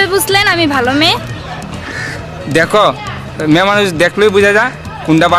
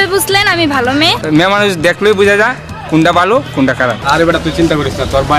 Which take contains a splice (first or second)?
second